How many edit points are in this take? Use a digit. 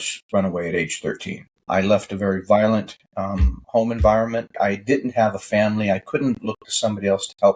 3